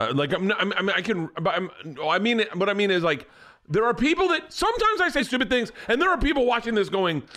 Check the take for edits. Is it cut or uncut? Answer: cut